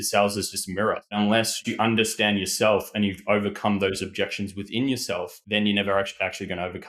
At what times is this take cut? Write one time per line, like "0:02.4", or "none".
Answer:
0:01.1
0:05.4